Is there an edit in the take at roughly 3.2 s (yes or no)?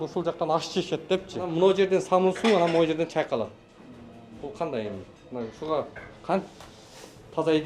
no